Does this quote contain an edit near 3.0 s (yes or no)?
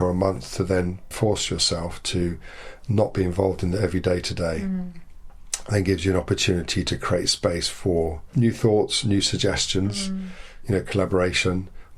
no